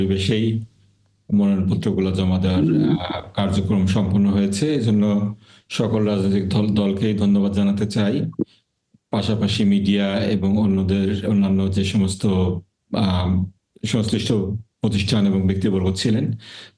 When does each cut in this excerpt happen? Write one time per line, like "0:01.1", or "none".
none